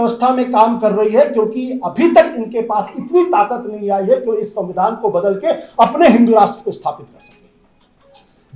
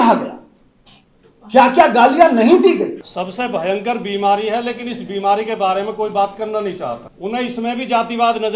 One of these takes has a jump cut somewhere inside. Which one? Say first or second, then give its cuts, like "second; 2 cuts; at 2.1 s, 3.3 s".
second; 2 cuts; at 3.0 s, 7.1 s